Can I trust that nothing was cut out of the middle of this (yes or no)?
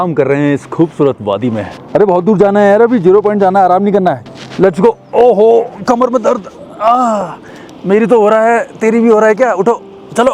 no